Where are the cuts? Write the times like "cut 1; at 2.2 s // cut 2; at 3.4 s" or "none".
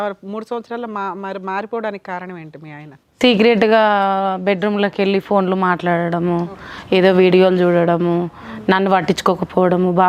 none

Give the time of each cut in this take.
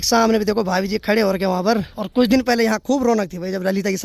cut 1; at 2.0 s

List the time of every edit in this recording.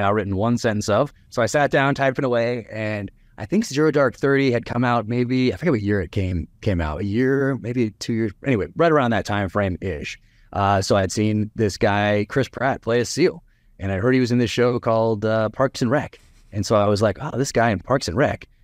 cut 1; at 1.2 s

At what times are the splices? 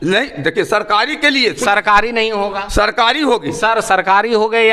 none

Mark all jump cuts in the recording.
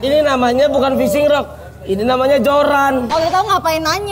cut 1; at 3.1 s

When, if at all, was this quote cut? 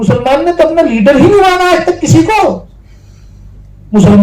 none

